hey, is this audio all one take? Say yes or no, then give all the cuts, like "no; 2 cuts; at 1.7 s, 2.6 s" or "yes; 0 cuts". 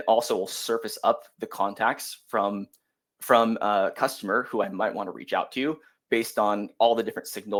yes; 0 cuts